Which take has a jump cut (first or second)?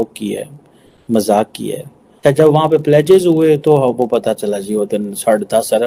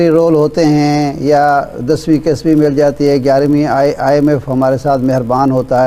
first